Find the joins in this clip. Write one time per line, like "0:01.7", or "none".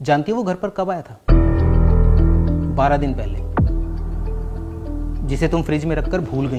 none